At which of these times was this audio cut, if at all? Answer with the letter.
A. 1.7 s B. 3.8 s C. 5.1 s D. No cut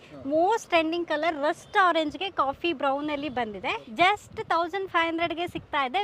B